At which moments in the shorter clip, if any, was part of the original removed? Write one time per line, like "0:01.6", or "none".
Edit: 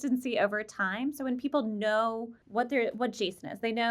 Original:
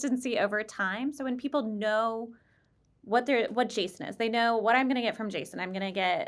0:02.3